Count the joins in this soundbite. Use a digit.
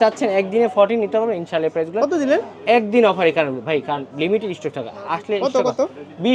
0